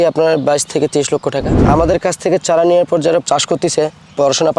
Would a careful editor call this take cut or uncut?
cut